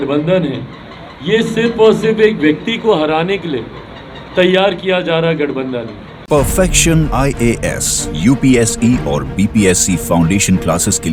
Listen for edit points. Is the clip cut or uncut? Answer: uncut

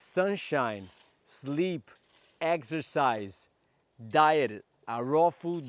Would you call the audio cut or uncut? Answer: uncut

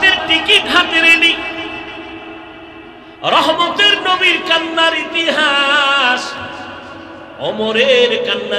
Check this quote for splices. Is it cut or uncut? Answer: uncut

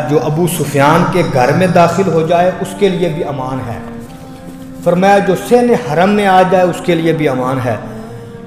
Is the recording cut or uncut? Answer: uncut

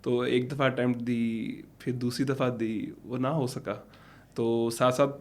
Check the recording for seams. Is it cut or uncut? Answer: uncut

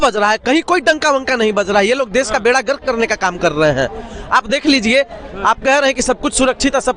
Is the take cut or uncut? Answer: uncut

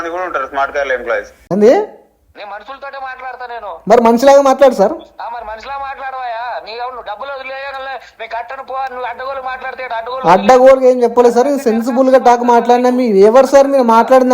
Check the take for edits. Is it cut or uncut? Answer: cut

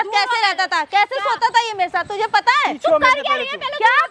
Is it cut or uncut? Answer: uncut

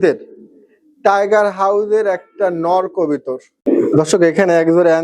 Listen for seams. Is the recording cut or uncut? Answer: cut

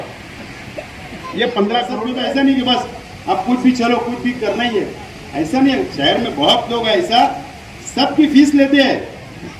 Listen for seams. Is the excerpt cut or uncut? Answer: cut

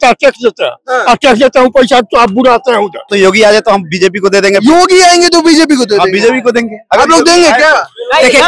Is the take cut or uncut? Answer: cut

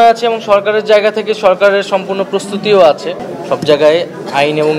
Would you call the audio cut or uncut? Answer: cut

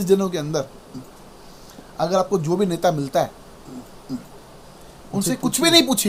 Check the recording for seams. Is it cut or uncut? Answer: uncut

